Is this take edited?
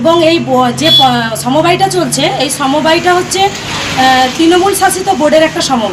no; 0 cuts

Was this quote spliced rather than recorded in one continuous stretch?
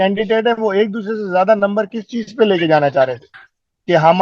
no; 0 cuts

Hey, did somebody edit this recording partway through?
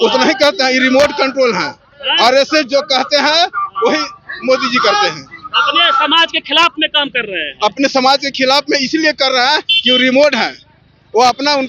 no; 0 cuts

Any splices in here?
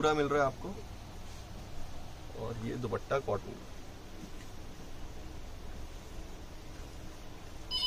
no; 0 cuts

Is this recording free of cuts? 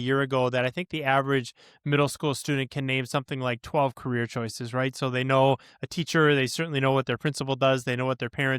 yes; 0 cuts

